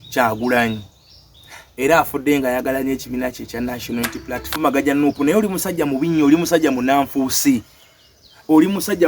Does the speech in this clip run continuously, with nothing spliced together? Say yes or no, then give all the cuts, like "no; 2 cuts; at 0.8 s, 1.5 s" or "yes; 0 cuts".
no; 1 cut; at 4.5 s